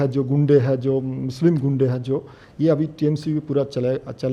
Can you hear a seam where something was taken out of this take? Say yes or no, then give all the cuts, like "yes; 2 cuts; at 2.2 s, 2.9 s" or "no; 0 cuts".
no; 0 cuts